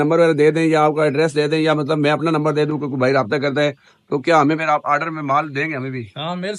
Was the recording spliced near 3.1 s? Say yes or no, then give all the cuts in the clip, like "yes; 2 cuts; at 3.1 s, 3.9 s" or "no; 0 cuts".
no; 0 cuts